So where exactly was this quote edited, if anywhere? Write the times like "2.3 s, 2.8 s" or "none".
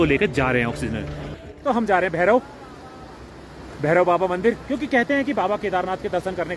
1.6 s